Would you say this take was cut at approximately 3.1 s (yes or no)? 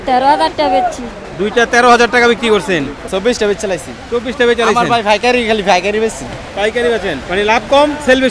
yes